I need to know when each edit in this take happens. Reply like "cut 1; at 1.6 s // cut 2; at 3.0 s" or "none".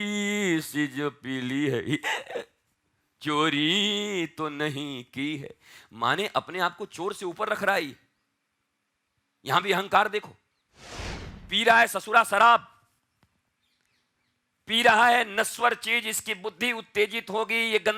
none